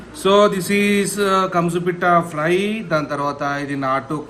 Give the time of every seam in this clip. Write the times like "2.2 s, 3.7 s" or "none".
none